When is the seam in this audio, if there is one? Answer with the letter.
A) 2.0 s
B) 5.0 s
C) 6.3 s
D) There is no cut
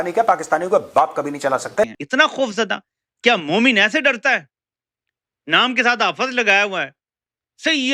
A